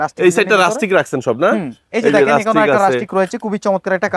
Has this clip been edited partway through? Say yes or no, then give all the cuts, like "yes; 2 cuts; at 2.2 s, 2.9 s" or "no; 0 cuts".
no; 0 cuts